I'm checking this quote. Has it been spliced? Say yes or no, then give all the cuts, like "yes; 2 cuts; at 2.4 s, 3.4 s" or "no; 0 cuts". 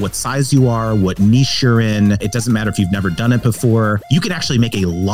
yes; 2 cuts; at 2.2 s, 4.0 s